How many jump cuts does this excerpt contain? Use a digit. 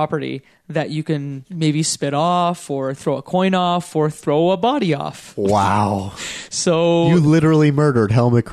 1